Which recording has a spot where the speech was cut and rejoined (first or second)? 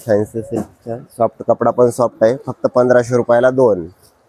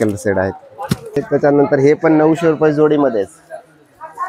second